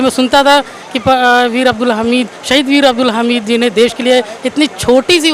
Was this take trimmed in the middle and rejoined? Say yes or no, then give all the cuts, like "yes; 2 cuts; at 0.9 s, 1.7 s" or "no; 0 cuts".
no; 0 cuts